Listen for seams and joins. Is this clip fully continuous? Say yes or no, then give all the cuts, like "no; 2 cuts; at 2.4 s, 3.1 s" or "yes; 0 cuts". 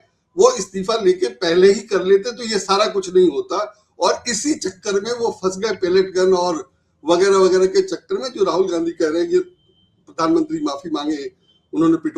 yes; 0 cuts